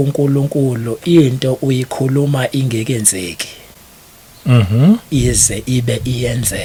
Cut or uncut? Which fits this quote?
uncut